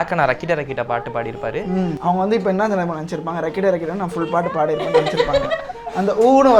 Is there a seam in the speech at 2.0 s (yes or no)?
yes